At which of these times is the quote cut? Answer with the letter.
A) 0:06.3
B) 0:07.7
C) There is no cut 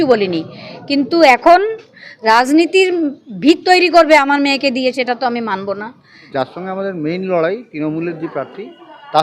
A